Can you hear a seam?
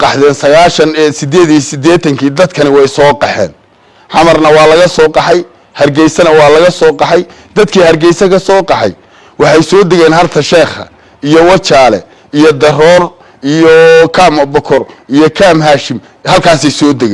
no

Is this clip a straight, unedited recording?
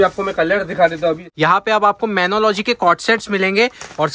no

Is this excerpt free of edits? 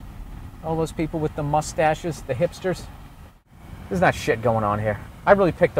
no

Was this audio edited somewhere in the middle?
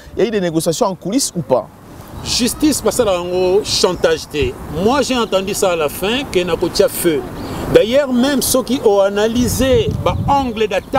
no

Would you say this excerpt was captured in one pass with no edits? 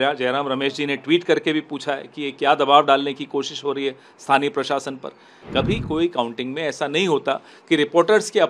no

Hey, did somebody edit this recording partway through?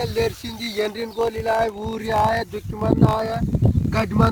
no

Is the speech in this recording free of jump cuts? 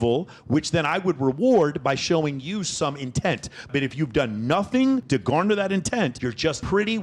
yes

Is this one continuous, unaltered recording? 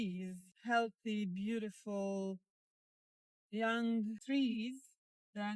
yes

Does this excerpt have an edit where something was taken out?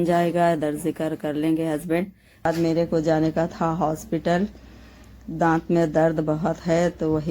yes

